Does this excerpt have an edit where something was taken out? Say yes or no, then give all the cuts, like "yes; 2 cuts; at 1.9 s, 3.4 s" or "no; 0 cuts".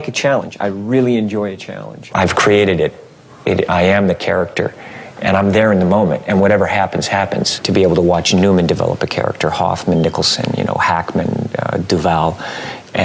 yes; 2 cuts; at 2.0 s, 7.6 s